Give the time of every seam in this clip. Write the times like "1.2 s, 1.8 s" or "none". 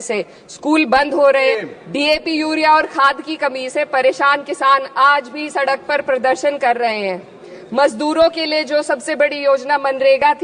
1.5 s

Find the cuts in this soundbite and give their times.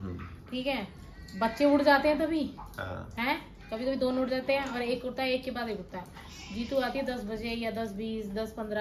none

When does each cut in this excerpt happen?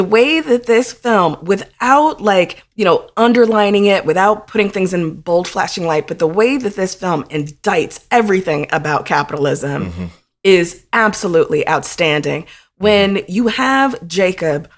none

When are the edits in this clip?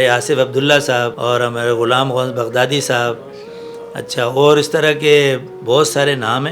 1.1 s

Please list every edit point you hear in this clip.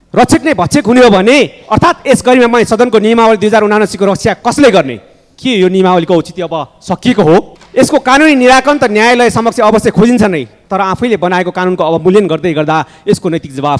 7.6 s

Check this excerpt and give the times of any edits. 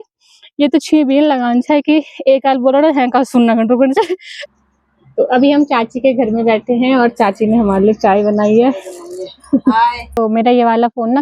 4.3 s, 10.1 s

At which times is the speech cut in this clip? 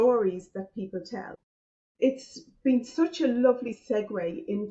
2.0 s

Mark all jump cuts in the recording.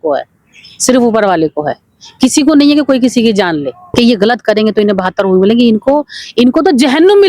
3.9 s

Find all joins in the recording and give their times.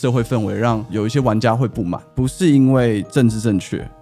0.9 s, 2.1 s

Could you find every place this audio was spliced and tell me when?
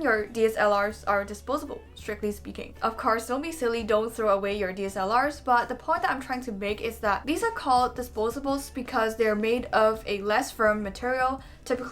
none

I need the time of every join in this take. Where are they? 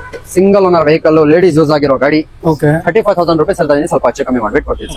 none

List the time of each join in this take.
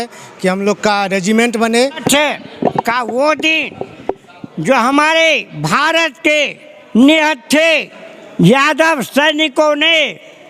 2.0 s

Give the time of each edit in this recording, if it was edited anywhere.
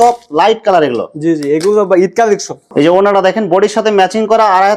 2.6 s

